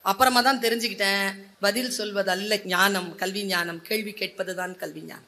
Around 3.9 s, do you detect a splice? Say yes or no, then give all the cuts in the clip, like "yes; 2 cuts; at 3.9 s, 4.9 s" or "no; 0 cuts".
no; 2 cuts; at 1.4 s, 2.6 s